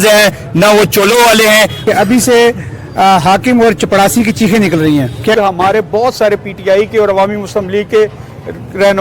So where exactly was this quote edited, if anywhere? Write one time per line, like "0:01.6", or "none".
0:01.8
0:05.4